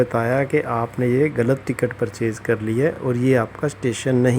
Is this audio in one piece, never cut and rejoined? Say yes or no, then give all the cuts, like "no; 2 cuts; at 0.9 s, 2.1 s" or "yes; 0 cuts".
no; 1 cut; at 3.0 s